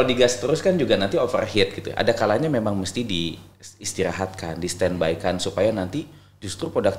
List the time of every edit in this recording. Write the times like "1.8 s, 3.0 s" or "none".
none